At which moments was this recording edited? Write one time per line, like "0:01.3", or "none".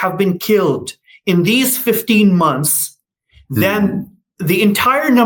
none

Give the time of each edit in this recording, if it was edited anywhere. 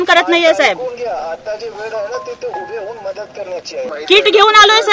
0:03.9

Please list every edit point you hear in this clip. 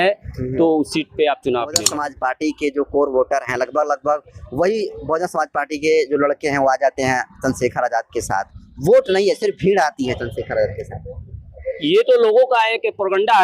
0:01.9

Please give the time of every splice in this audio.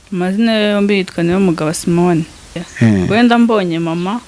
0:02.5

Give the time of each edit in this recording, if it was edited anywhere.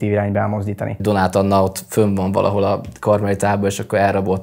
0:01.0

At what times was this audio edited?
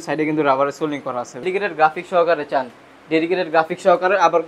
0:01.4

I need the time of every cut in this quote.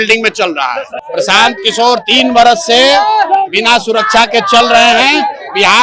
0:00.9

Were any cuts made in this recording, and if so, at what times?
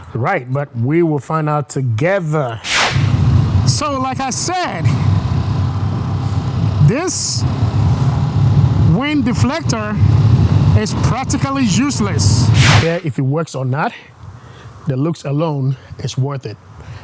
0:02.8
0:12.8

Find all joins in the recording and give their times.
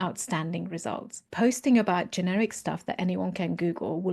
0:01.2

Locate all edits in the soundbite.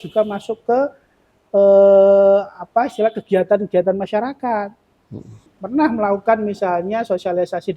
0:05.5

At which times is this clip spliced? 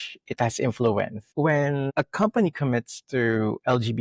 0:01.9

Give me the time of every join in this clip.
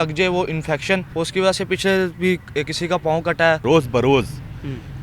0:01.1
0:03.6

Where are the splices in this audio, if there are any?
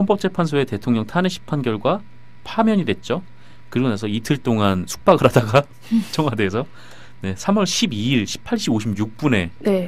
0:03.9

